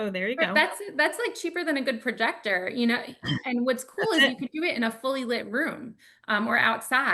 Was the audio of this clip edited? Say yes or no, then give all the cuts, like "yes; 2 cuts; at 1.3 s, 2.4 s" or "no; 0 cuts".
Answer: no; 0 cuts